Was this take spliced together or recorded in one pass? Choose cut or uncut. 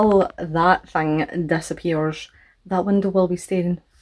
uncut